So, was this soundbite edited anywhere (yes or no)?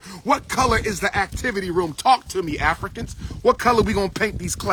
no